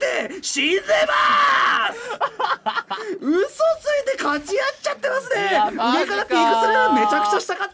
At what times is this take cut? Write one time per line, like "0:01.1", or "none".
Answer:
none